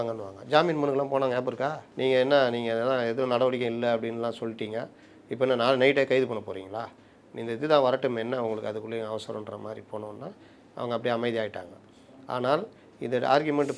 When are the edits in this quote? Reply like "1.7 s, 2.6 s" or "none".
1.8 s